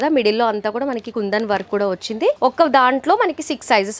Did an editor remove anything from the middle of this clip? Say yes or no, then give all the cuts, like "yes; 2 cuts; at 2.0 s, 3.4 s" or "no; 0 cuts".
no; 0 cuts